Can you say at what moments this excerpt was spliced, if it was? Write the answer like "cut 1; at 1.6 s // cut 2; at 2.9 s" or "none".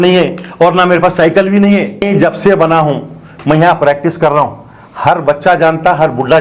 cut 1; at 2.0 s